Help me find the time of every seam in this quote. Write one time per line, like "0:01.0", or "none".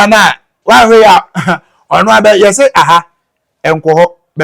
none